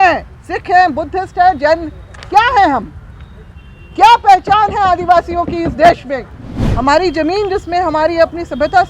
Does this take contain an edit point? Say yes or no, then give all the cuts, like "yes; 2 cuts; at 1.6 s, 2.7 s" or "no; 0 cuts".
yes; 1 cut; at 6.6 s